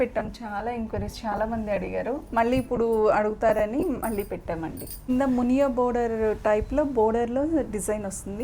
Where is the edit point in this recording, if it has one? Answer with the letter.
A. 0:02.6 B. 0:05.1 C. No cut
B